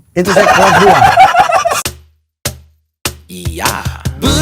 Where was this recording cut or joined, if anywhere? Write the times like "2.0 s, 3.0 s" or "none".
1.8 s

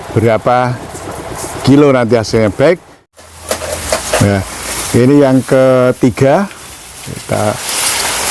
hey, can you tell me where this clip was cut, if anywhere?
3.0 s

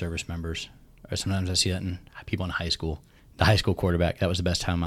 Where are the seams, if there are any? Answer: 3.1 s

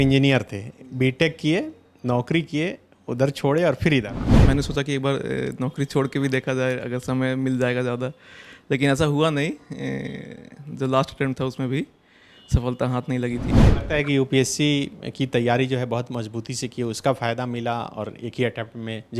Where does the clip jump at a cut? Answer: 4.2 s, 13.6 s

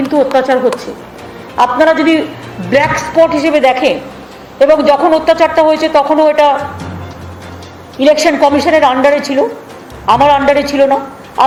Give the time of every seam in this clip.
none

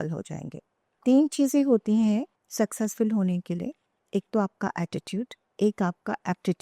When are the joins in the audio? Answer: 1.0 s, 2.4 s

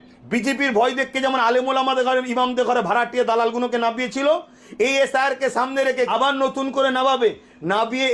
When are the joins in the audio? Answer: 6.1 s

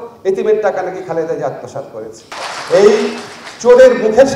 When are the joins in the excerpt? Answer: 2.3 s

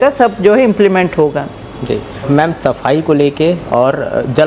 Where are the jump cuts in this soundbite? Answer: none

